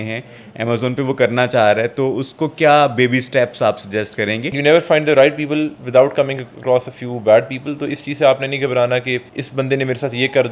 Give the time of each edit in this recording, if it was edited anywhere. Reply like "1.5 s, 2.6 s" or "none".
4.6 s, 9.4 s